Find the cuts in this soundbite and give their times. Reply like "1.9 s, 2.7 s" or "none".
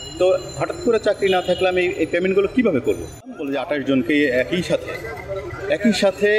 3.5 s